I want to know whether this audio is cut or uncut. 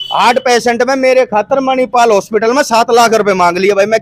uncut